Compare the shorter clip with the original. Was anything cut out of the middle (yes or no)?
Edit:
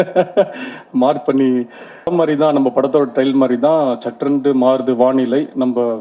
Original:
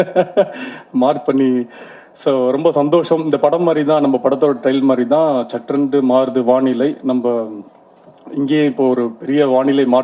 yes